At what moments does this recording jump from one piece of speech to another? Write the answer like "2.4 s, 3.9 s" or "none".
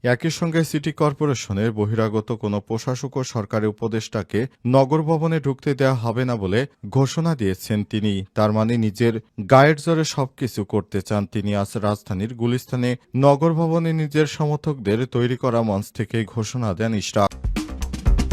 17.4 s

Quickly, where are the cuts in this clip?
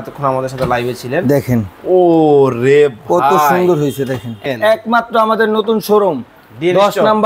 4.4 s

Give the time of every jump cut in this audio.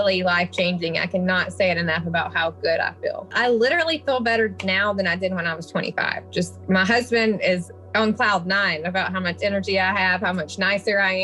3.3 s

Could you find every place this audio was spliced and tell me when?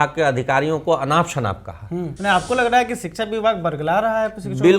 2.1 s

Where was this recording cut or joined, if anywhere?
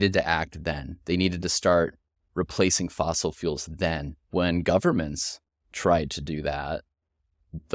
4.1 s

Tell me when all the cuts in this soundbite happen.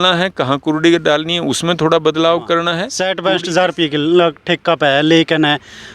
2.9 s

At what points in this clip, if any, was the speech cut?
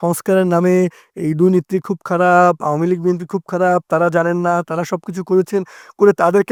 none

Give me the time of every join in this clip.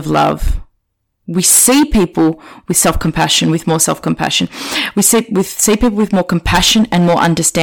none

